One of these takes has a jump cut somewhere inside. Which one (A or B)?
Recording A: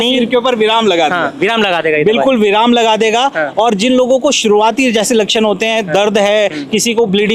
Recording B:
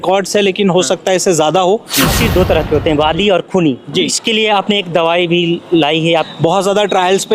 B